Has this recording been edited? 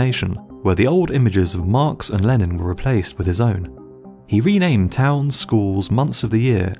yes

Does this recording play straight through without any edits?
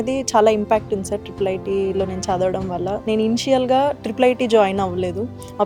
yes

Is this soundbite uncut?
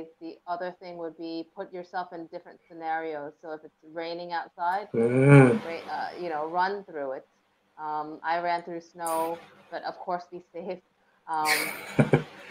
yes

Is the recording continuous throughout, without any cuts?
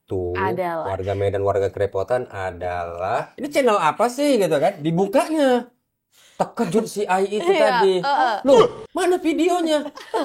no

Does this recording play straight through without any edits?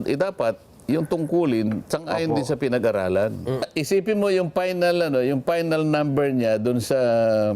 no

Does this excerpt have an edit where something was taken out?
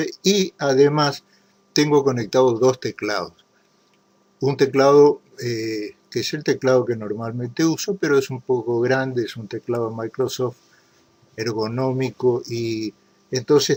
no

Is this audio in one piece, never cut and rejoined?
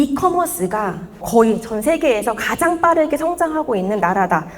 no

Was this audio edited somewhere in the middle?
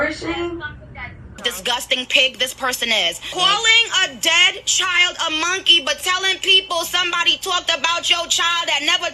yes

